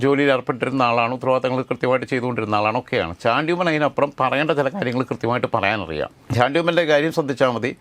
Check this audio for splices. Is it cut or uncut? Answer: uncut